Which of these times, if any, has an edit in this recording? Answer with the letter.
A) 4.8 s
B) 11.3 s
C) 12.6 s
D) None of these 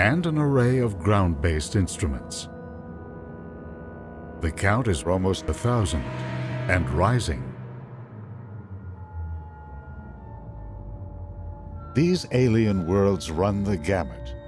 C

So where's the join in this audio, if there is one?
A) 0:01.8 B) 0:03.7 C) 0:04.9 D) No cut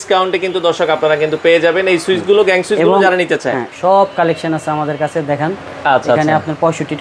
B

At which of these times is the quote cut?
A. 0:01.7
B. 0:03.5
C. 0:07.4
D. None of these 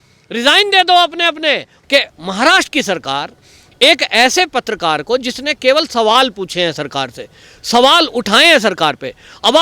A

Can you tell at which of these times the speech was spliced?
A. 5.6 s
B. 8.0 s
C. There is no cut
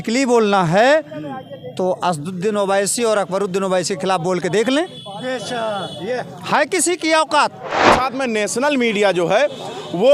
B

